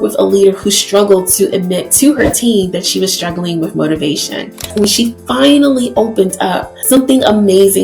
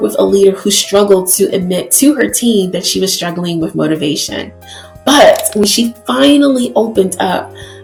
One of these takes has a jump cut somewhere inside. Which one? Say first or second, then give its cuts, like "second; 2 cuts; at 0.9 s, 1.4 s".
first; 2 cuts; at 4.7 s, 7.0 s